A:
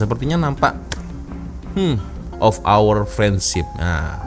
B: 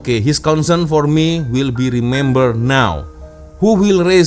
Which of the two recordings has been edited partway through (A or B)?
A